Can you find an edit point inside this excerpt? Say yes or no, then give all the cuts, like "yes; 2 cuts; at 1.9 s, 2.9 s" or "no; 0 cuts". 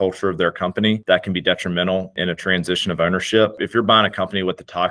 yes; 3 cuts; at 1.0 s, 2.1 s, 3.6 s